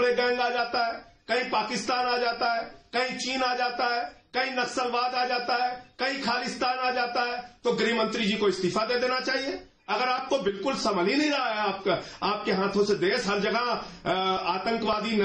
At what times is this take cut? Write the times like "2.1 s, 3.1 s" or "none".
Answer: none